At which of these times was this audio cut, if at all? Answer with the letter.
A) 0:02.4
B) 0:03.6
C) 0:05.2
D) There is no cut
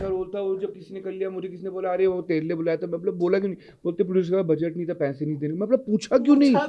D